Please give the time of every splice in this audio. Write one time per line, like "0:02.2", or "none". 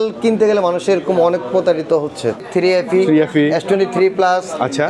0:02.4